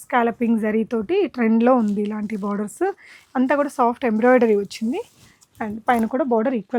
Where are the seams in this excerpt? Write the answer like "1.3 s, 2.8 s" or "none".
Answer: none